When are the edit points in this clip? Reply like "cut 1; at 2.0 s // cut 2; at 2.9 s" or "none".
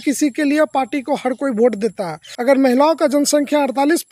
cut 1; at 2.2 s